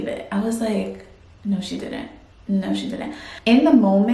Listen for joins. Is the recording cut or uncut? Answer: uncut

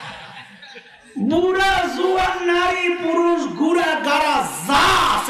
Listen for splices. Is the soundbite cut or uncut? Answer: cut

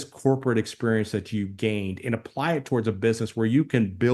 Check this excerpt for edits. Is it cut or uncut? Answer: uncut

